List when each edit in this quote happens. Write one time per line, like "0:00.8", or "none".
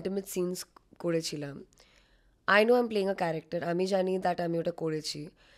none